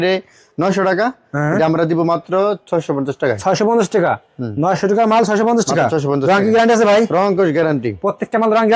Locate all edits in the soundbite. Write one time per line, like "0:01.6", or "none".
none